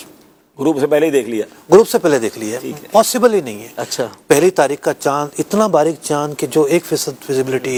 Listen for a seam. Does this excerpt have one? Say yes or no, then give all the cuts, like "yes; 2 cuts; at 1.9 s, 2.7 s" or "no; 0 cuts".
no; 0 cuts